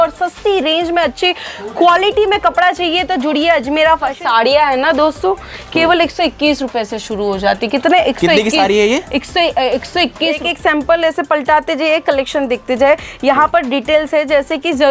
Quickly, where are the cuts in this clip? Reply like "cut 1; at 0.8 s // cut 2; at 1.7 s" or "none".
cut 1; at 4.2 s // cut 2; at 10.4 s